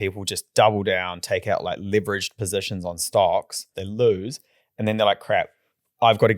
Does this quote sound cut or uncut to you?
cut